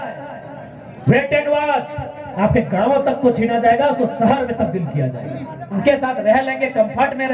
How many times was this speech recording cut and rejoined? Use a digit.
1